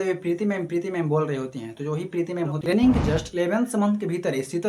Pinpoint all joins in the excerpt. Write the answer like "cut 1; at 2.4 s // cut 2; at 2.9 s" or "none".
cut 1; at 2.7 s